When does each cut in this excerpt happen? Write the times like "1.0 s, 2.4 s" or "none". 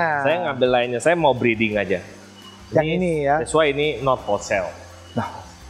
none